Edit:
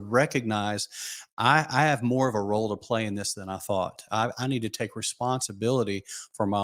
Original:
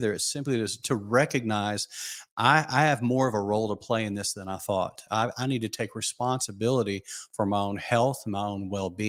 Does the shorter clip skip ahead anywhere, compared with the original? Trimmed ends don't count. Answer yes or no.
no